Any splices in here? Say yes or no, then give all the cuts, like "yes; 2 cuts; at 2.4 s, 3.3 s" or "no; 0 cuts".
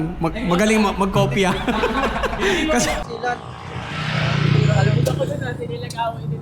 yes; 1 cut; at 3.0 s